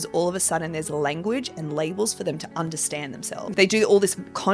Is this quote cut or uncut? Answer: cut